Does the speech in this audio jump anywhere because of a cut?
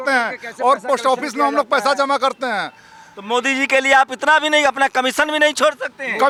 no; 0 cuts

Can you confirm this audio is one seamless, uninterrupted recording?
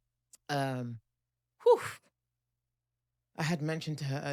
yes; 0 cuts

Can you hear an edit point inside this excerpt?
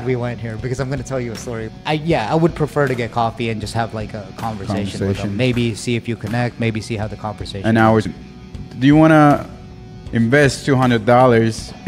yes; 2 cuts; at 1.7 s, 8.1 s

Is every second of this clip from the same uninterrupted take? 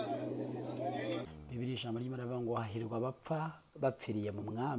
no; 1 cut; at 1.4 s

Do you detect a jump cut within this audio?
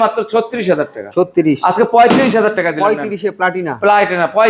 no; 0 cuts

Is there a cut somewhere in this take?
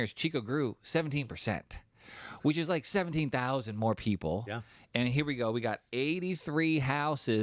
no; 0 cuts

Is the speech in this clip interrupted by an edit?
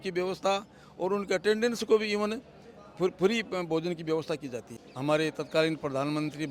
yes; 1 cut; at 4.7 s

